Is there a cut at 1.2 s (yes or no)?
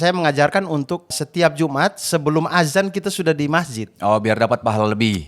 yes